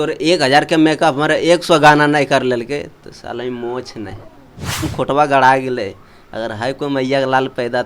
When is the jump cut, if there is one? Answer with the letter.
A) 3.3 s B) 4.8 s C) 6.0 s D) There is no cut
B